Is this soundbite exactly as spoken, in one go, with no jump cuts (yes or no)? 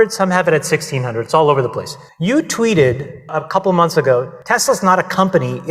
no